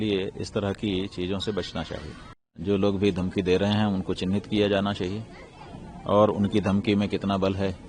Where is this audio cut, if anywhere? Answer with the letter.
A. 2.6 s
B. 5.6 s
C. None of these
A